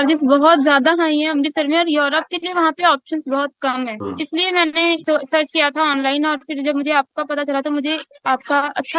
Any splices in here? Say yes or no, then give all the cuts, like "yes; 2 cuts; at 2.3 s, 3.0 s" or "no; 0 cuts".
yes; 2 cuts; at 4.0 s, 5.0 s